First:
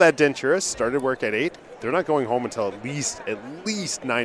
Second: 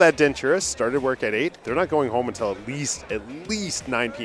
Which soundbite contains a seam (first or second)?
second